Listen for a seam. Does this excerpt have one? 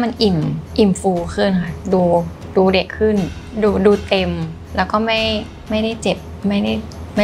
yes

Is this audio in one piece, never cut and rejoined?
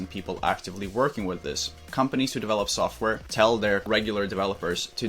no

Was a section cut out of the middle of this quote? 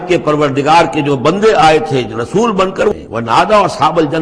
yes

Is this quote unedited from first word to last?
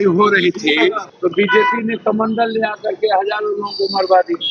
no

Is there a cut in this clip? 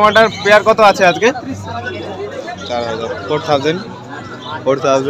yes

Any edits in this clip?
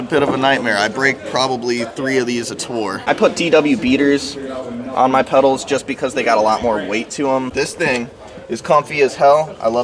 yes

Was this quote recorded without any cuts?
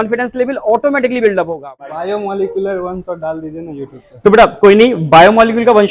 no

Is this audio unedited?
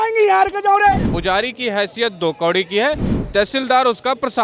no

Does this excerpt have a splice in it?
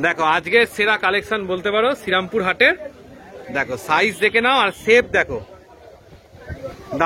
no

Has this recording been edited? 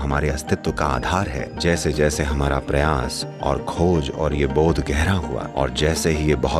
yes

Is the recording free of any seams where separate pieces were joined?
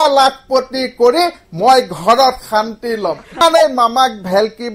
no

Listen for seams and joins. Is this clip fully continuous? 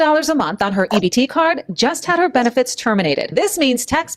no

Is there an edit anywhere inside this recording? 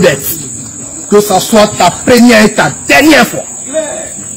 no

